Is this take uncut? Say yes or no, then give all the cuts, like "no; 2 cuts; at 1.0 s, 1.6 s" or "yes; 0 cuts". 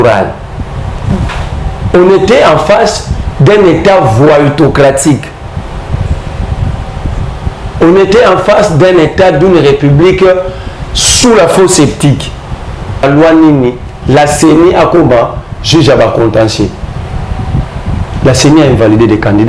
no; 1 cut; at 13.0 s